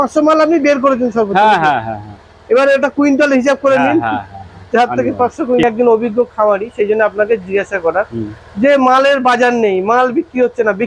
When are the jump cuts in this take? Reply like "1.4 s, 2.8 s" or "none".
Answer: 5.6 s